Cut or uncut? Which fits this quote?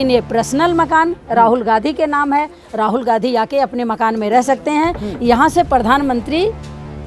uncut